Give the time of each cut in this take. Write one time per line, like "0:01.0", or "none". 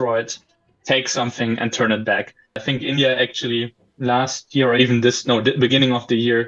0:02.6